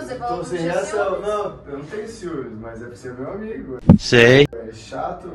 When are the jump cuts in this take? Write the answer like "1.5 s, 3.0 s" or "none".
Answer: none